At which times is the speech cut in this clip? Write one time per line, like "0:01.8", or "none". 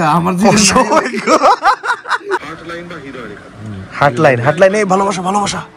0:02.5

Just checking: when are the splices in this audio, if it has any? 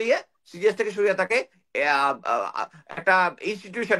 none

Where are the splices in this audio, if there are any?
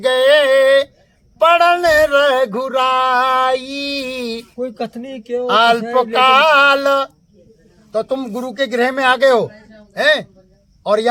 none

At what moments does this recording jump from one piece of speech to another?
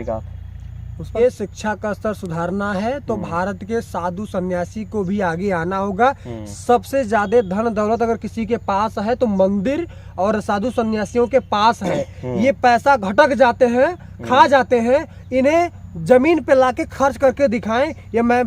0:01.2

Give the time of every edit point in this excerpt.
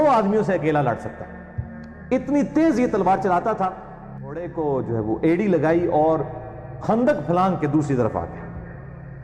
0:04.2

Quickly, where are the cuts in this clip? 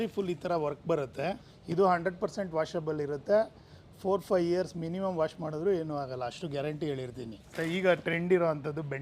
0:01.5
0:07.5

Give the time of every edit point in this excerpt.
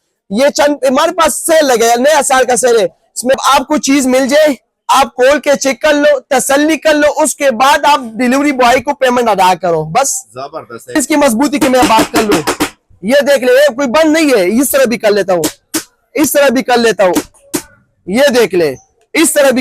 0:03.3
0:11.0

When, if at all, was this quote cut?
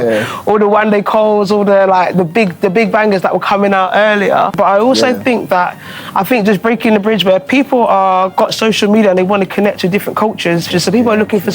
0:04.5
0:10.7

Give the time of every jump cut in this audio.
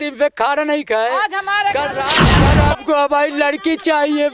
0:02.2

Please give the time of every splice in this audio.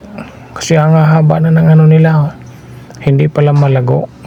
none

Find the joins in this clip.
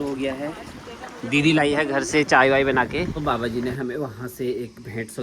0:03.2

